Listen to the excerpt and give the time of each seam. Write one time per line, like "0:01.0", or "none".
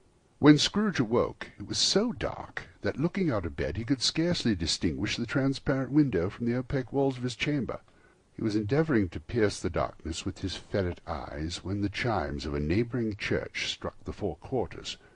0:11.0